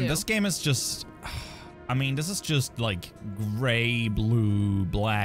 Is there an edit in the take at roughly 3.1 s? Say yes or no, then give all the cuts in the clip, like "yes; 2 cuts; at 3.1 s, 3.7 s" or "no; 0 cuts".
no; 0 cuts